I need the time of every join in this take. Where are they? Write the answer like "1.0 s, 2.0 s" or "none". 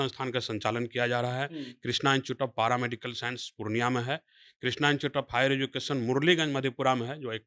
none